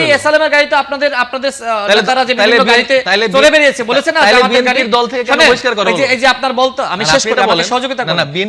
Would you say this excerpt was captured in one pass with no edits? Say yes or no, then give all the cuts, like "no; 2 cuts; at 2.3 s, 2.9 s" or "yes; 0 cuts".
yes; 0 cuts